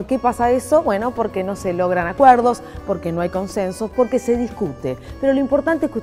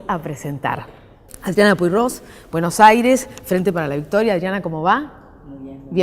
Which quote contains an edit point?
second; 1 cut; at 2.5 s

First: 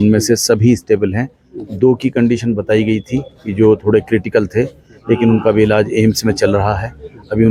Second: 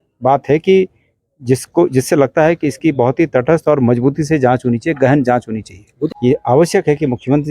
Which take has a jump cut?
second; 1 cut; at 5.9 s

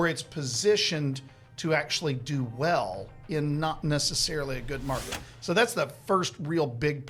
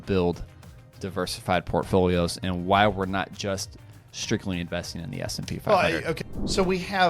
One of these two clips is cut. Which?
second; 1 cut; at 6.2 s

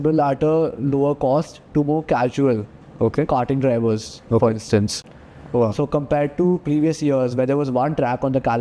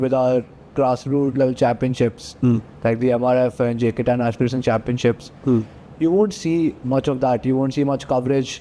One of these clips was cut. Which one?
first; 1 cut; at 5.0 s

